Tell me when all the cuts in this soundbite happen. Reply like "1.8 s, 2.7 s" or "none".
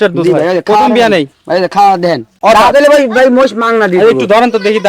2.3 s